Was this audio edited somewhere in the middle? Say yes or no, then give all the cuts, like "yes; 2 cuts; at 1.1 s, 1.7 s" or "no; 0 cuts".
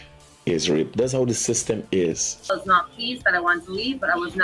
yes; 1 cut; at 2.5 s